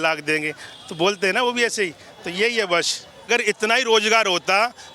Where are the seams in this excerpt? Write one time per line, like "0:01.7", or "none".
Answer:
0:03.3

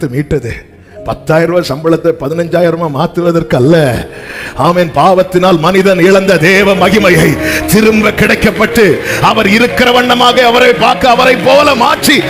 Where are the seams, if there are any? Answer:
none

